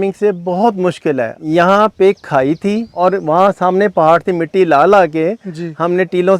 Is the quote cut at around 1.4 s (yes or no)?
yes